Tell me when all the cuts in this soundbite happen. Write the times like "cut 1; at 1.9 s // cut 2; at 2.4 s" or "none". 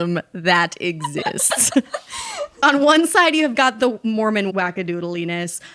cut 1; at 2.6 s

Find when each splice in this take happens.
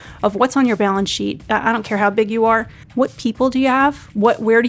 cut 1; at 1.4 s // cut 2; at 2.8 s

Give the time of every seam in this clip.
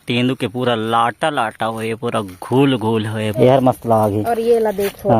cut 1; at 3.4 s

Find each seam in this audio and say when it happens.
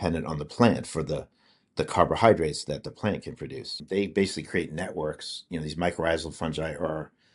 cut 1; at 3.8 s

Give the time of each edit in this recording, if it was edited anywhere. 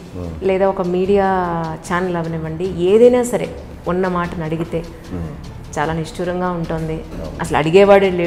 none

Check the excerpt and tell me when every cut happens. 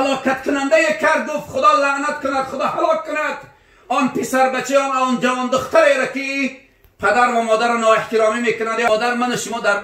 cut 1; at 8.9 s

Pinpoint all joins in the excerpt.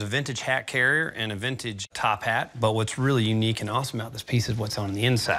none

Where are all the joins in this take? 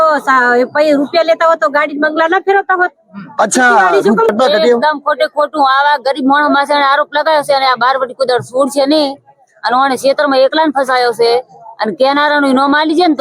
cut 1; at 4.3 s

